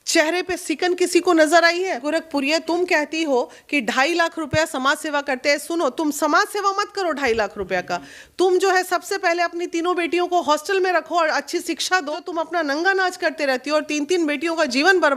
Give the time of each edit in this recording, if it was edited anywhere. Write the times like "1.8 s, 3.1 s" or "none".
2.0 s, 12.2 s